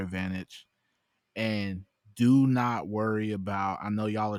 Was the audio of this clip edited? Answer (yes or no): no